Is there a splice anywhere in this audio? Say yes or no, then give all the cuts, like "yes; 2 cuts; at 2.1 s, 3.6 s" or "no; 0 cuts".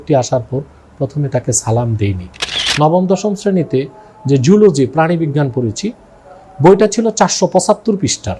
yes; 1 cut; at 2.6 s